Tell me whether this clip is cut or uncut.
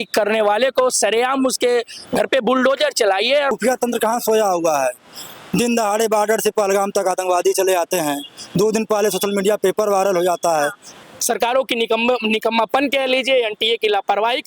cut